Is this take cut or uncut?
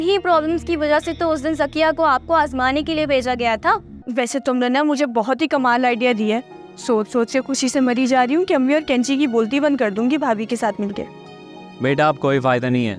cut